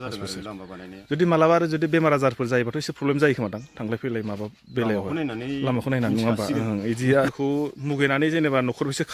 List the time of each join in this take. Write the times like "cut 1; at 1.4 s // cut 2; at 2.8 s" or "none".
cut 1; at 7.3 s